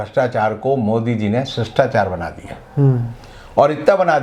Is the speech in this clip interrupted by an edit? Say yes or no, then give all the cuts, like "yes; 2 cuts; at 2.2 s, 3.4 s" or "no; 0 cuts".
no; 0 cuts